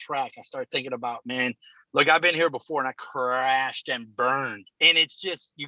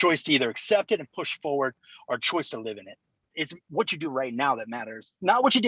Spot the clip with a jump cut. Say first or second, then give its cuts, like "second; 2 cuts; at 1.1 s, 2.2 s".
second; 1 cut; at 3.2 s